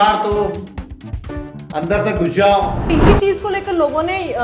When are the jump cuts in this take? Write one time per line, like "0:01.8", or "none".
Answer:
0:02.9